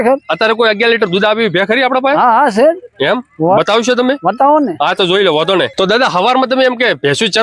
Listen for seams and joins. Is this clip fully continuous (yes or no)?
yes